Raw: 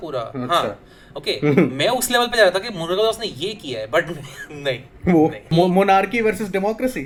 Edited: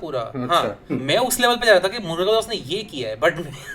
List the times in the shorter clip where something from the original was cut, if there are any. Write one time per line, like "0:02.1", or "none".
0:01.0